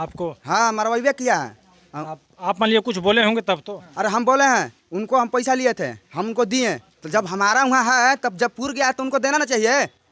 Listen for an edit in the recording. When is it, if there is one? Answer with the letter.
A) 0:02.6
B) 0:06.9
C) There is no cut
C